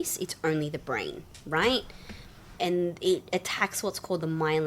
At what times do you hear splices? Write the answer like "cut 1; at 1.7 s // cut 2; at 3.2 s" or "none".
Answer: cut 1; at 2.6 s